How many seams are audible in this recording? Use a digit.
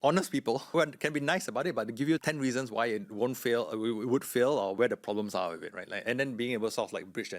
4